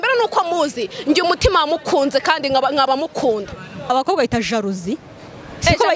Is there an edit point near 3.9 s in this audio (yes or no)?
yes